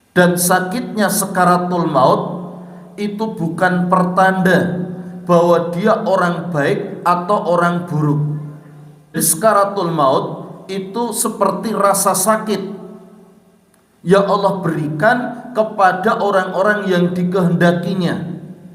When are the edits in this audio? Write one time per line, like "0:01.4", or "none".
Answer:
0:09.2